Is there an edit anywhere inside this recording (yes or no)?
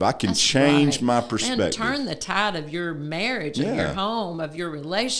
no